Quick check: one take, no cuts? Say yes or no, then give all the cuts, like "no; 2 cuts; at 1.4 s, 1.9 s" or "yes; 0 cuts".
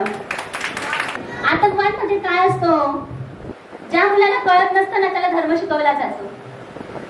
no; 1 cut; at 1.2 s